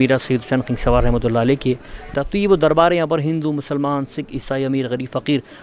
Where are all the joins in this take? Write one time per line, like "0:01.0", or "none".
0:02.1